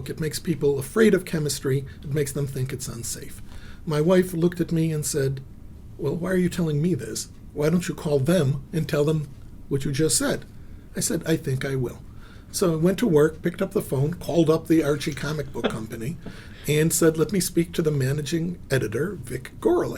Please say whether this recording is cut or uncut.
uncut